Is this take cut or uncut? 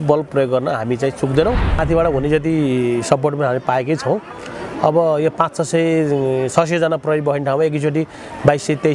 cut